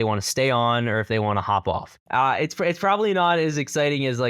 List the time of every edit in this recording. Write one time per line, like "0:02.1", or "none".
0:02.0

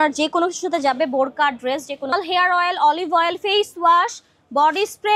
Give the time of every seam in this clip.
0:02.1

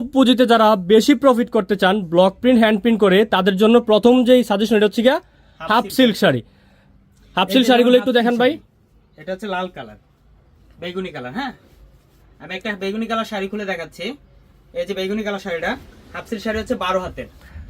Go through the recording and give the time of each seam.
none

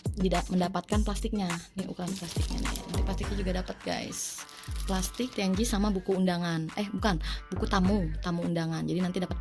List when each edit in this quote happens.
none

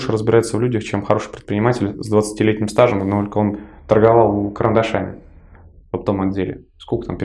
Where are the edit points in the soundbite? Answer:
none

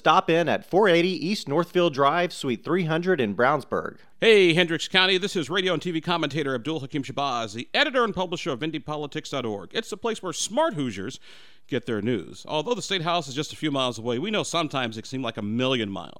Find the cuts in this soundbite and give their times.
0:04.0

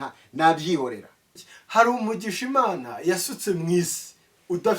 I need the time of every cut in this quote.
0:01.5

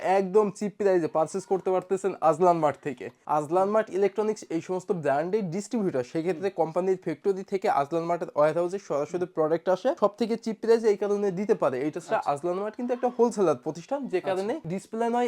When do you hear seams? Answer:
0:03.1

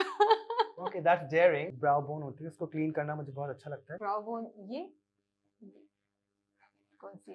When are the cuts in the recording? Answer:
0:01.6
0:03.9

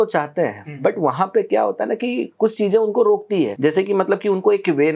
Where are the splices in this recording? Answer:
0:03.5

